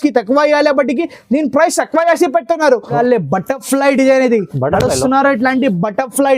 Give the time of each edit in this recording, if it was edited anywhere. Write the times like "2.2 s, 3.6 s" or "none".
2.9 s